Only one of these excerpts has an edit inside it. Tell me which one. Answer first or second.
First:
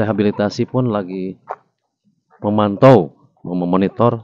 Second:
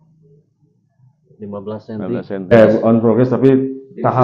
second